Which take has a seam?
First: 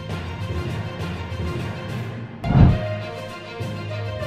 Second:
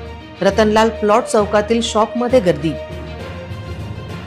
first; 1 cut; at 1.7 s

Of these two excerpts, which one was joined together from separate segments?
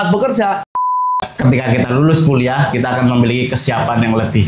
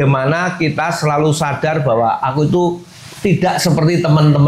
first; 1 cut; at 0.9 s

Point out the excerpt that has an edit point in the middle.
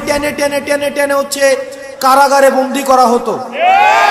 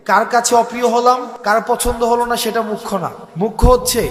second; 2 cuts; at 1.3 s, 3.2 s

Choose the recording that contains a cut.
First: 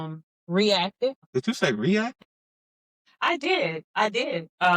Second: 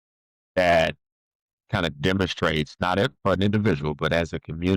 first; 1 cut; at 1.2 s

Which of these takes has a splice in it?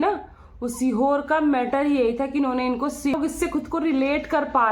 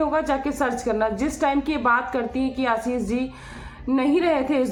first; 1 cut; at 3.1 s

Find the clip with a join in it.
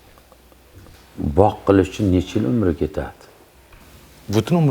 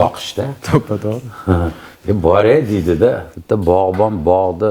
second; 1 cut; at 3.3 s

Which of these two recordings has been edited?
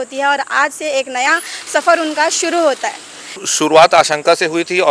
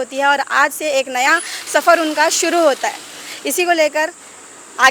first; 1 cut; at 3.4 s

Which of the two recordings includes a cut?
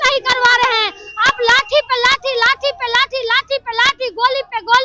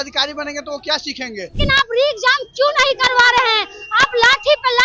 second; 1 cut; at 1.5 s

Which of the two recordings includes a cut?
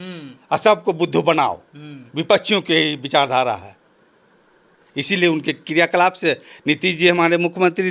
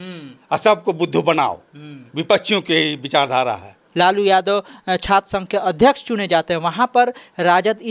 second; 1 cut; at 3.8 s

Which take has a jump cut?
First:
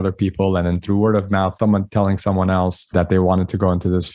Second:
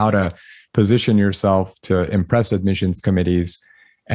first; 1 cut; at 2.8 s

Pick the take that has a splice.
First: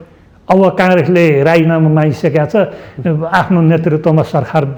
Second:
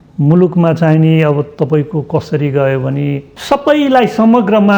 second; 1 cut; at 3.3 s

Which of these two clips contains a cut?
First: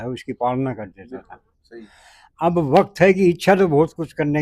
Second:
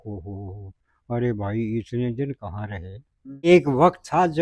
second; 1 cut; at 3.5 s

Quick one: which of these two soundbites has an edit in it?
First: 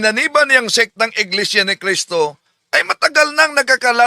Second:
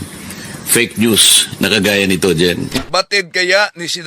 second; 1 cut; at 2.8 s

